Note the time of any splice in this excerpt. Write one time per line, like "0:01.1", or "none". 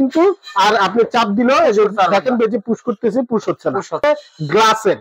0:04.0